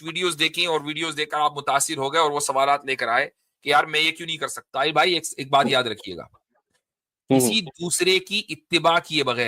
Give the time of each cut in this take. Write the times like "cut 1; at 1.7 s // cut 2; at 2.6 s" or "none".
cut 1; at 4.6 s